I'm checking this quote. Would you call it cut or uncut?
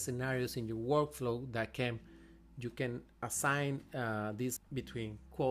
cut